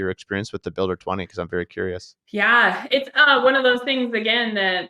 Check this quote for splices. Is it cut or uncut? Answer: cut